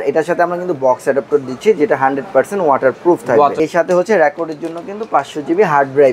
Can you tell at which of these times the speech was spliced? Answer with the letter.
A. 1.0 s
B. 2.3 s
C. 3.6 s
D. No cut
C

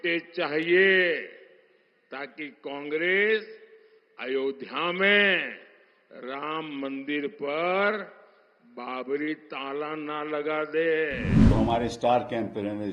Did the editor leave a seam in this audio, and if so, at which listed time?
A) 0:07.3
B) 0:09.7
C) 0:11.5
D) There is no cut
C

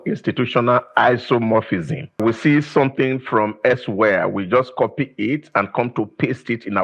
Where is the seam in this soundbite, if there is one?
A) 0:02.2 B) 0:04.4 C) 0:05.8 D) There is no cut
A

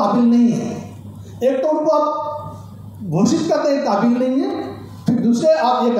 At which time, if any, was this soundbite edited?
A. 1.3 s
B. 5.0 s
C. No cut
C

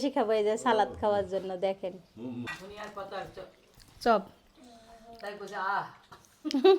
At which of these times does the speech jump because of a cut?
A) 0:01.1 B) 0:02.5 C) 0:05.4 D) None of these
B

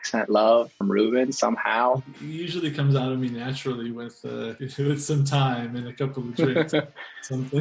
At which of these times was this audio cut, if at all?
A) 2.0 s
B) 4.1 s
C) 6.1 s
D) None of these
A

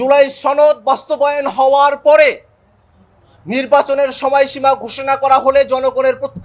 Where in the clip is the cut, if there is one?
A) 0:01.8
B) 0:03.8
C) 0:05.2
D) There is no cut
D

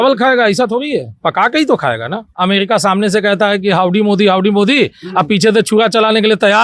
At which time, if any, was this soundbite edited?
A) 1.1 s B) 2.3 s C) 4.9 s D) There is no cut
B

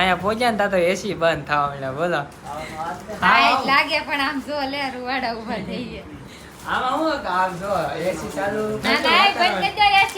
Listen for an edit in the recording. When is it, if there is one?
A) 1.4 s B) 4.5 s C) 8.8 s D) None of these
C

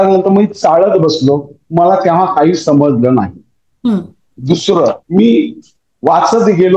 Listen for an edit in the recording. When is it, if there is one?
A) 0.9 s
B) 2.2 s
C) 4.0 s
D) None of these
D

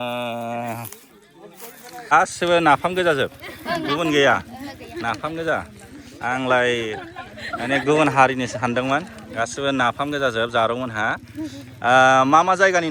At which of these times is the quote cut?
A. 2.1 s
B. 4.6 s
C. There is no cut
A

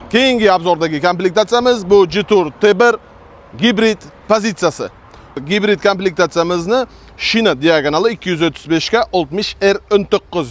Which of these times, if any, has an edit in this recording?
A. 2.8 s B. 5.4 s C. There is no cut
B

